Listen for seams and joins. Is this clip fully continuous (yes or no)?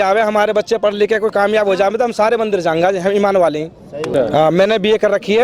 no